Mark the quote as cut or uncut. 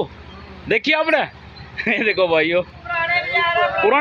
cut